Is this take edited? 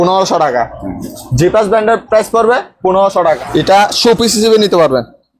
yes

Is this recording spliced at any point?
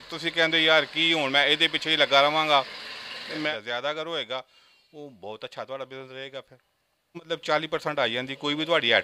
yes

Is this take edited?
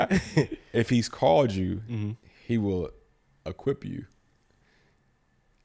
no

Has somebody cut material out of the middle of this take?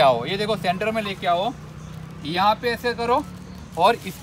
no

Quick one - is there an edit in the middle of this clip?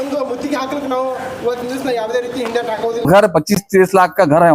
yes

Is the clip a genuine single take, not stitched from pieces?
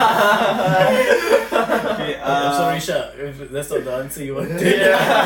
yes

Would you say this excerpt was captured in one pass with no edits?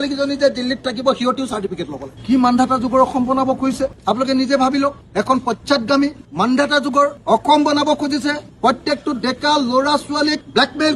yes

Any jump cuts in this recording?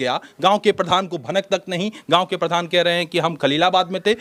no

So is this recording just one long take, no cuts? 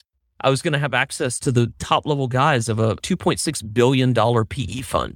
no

